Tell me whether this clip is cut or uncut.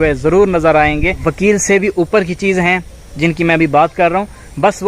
cut